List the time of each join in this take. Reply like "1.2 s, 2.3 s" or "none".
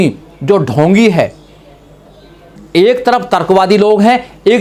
2.5 s